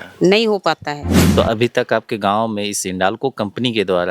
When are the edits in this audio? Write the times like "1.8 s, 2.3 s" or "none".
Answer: 1.2 s